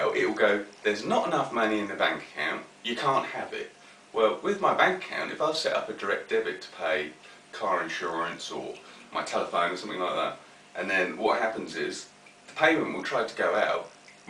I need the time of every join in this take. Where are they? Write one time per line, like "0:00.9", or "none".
none